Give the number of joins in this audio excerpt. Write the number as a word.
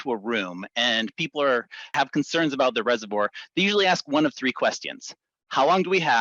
one